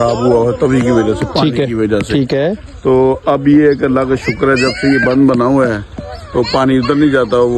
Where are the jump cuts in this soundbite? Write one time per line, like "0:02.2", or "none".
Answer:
none